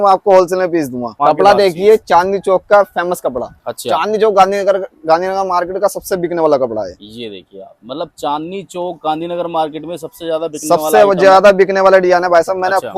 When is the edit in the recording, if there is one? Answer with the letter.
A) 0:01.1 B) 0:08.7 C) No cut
A